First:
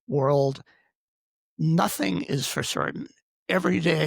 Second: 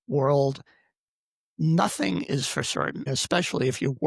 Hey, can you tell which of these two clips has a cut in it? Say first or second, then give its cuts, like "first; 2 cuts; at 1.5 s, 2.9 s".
second; 1 cut; at 3.2 s